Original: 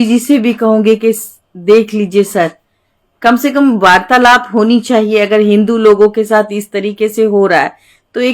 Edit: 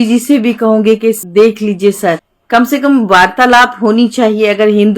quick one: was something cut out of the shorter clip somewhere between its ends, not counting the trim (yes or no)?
yes